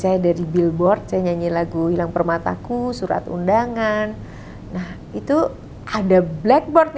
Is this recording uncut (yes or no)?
yes